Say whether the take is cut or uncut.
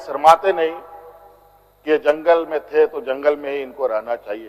uncut